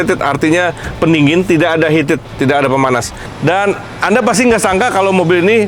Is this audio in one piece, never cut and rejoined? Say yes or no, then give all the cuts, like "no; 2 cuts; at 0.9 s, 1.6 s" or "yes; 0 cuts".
no; 1 cut; at 3.2 s